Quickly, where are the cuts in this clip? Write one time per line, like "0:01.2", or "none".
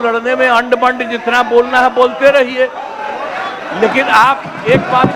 none